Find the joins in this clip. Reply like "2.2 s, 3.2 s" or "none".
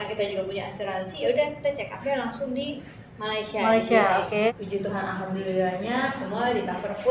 4.5 s